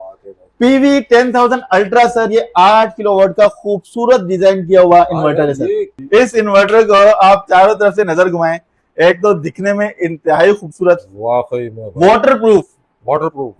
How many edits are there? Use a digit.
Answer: 1